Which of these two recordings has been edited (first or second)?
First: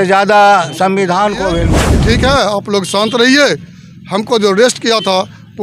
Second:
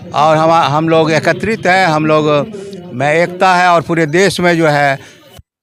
first